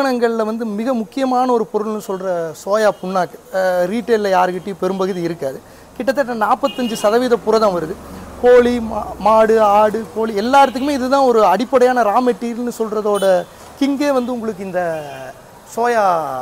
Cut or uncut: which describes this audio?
uncut